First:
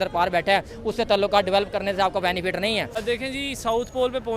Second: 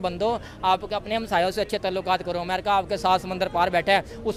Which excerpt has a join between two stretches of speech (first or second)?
first